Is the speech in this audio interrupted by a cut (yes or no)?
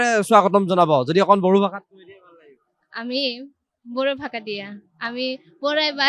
no